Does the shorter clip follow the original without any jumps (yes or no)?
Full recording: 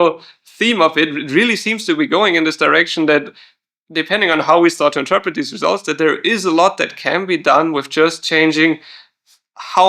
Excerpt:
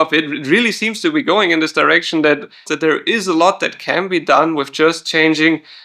no